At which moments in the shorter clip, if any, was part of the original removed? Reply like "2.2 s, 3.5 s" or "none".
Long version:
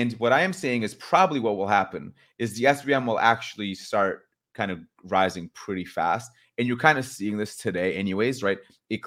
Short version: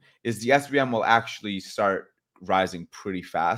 2.2 s

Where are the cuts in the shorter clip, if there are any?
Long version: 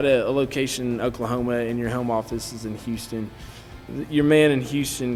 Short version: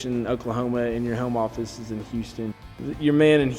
2.7 s

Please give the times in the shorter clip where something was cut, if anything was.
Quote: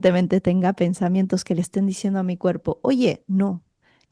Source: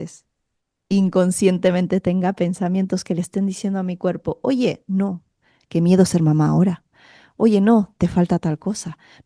none

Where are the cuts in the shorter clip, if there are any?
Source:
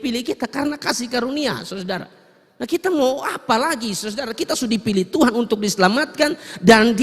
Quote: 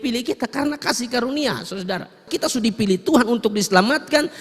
2.2 s

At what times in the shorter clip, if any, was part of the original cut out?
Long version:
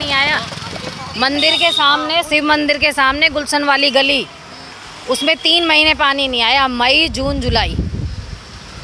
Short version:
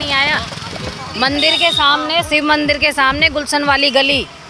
none

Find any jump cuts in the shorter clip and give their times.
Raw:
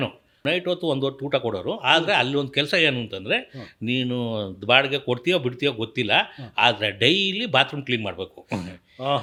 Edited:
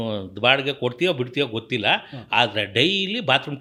none

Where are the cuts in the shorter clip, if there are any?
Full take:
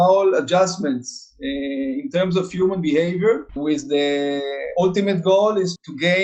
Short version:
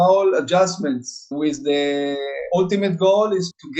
1.2 s

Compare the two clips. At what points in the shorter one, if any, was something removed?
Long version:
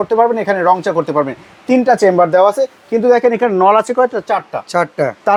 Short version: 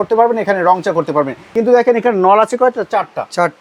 1.4 s

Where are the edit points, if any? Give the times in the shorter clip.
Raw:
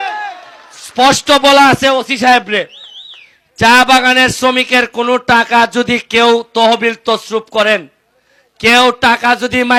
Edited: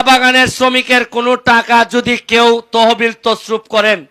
none

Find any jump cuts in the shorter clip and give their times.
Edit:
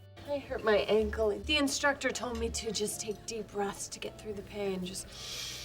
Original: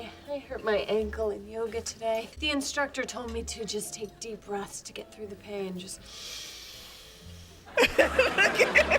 1.4 s

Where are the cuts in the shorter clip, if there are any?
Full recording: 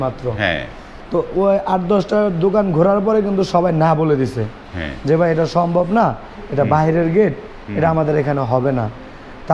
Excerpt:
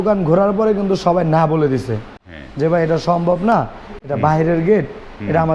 none

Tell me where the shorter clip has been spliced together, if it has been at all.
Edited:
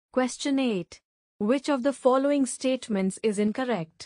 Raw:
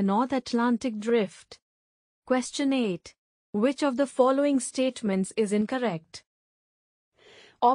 none

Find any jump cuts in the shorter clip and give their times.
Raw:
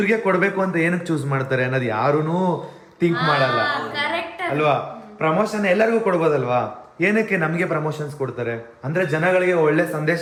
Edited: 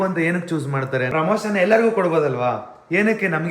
1.1 s

